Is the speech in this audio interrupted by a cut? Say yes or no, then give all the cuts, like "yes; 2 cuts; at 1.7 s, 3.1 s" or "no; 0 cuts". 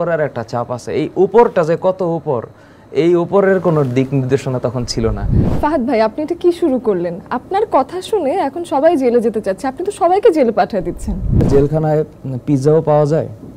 yes; 2 cuts; at 5.5 s, 11.5 s